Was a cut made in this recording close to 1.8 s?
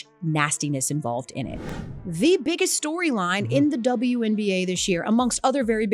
yes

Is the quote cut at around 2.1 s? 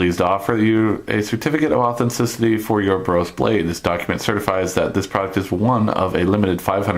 yes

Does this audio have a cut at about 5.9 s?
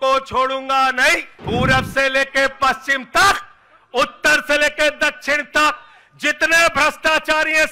no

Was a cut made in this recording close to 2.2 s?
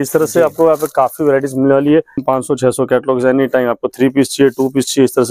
yes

